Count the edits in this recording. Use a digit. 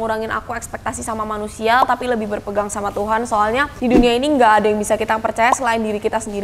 1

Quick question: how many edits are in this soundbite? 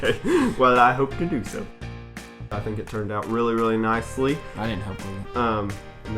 1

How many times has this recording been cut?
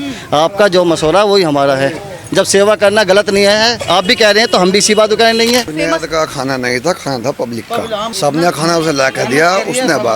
2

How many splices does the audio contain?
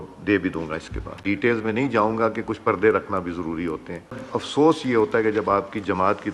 2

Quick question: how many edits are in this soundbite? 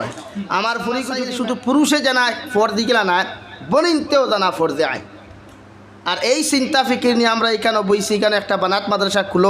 1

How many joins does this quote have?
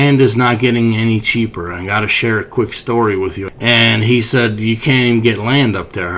1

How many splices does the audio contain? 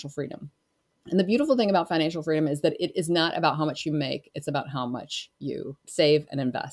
1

